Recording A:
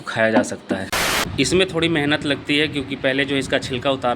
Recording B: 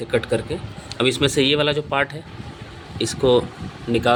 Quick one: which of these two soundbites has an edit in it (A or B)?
A